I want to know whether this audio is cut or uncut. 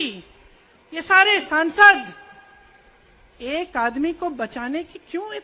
uncut